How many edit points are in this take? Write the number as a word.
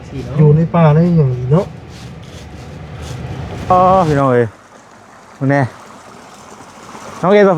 one